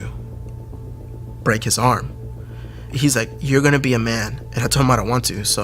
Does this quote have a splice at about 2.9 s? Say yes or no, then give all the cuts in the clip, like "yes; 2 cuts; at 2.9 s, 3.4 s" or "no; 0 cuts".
yes; 1 cut; at 2.9 s